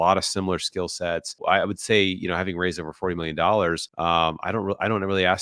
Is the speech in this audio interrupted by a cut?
yes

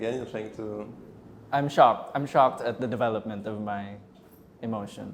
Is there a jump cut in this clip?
no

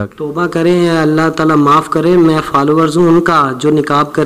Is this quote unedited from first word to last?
yes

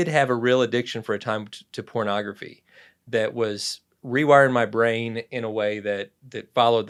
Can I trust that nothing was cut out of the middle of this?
yes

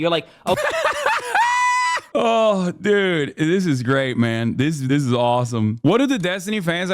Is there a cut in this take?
yes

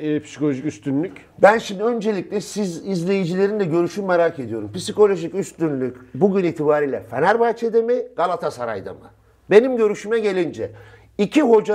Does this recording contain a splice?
no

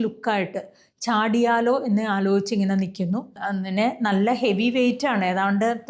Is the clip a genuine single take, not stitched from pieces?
no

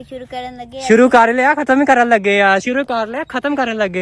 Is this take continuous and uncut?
yes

